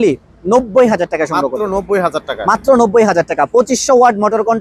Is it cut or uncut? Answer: uncut